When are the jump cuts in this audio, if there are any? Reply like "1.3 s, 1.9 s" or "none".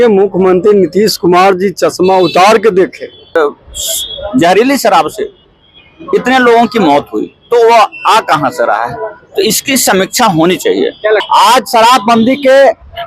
3.4 s, 11.2 s